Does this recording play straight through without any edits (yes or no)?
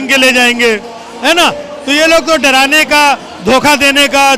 yes